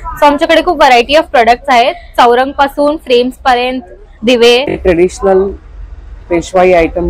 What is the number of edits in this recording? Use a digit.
1